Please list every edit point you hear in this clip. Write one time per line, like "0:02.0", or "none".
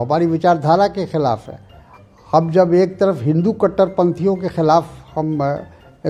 none